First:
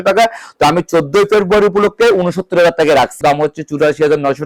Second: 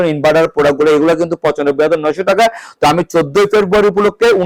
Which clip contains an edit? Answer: first; 1 cut; at 3.2 s

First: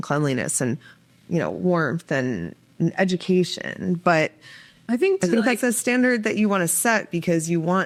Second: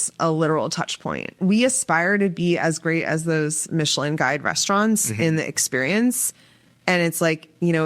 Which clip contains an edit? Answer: second; 1 cut; at 1.3 s

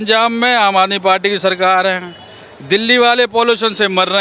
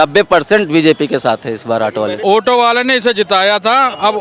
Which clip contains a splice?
second; 1 cut; at 2.2 s

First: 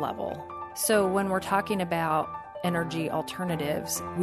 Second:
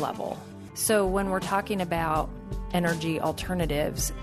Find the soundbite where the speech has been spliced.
first; 1 cut; at 2.4 s

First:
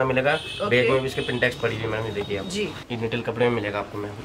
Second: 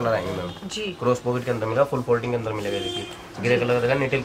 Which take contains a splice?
first; 1 cut; at 2.8 s

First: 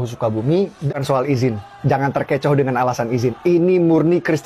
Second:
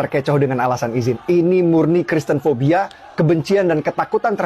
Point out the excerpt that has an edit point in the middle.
first; 1 cut; at 0.9 s

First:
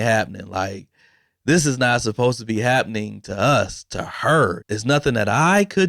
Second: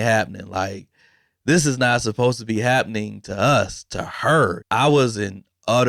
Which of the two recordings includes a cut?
first; 1 cut; at 4.6 s

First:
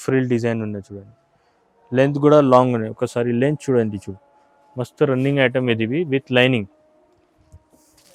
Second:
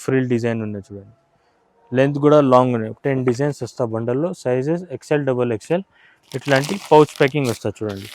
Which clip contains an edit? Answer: second; 1 cut; at 2.9 s

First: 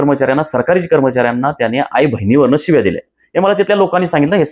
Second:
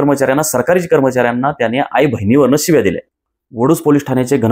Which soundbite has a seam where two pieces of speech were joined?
second; 1 cut; at 3.1 s

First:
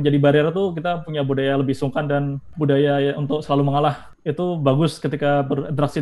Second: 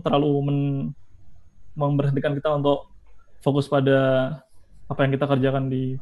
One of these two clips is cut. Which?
first; 2 cuts; at 2.4 s, 4.1 s

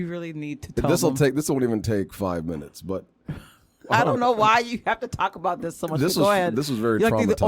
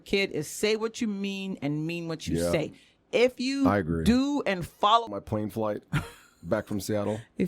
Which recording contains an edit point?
second; 1 cut; at 5.1 s

